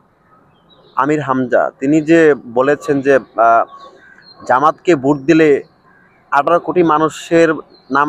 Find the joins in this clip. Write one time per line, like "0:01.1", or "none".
none